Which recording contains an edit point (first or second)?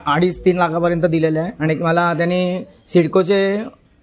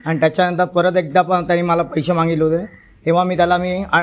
first